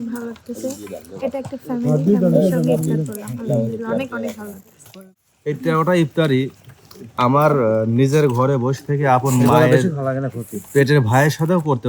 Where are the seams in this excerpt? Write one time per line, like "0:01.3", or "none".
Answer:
0:04.8